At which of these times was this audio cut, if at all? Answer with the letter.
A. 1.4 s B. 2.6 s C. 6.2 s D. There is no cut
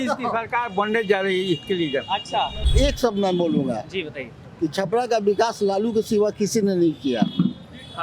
B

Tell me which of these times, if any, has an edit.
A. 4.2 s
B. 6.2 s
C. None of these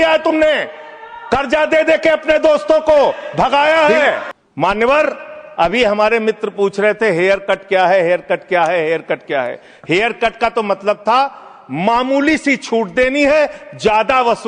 A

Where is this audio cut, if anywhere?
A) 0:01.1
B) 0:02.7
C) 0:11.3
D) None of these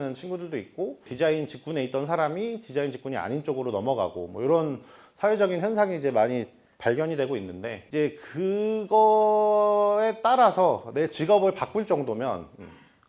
A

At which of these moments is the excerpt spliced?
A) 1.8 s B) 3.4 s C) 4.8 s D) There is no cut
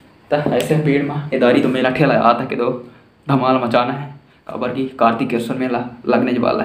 D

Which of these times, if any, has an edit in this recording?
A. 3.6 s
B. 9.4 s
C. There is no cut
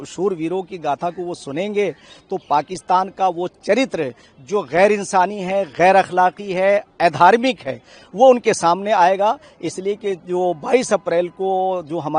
C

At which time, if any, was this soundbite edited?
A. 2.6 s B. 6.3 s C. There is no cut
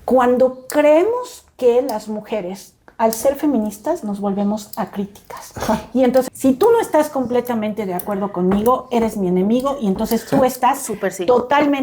B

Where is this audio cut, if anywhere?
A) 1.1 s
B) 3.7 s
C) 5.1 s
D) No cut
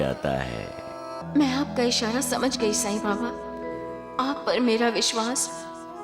A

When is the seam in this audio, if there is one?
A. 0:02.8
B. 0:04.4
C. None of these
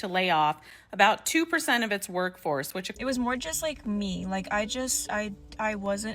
A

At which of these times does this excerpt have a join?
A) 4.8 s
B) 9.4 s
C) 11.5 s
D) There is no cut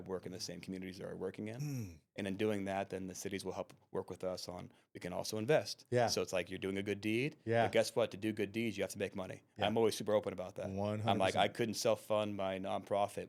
D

